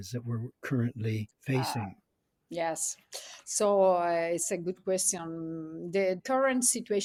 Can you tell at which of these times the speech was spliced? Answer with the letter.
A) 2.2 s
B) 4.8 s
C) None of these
C